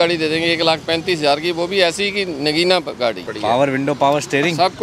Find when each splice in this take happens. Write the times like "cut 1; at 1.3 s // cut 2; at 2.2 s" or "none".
cut 1; at 3.3 s